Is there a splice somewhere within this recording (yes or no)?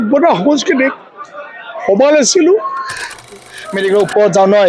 yes